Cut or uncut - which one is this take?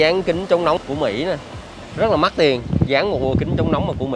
cut